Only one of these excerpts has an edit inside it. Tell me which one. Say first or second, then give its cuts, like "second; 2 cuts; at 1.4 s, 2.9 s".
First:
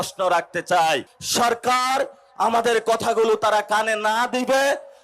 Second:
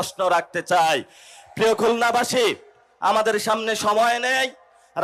first; 1 cut; at 1.2 s